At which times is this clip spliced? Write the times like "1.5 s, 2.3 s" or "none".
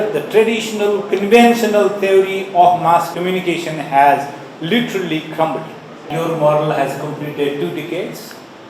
3.1 s, 6.1 s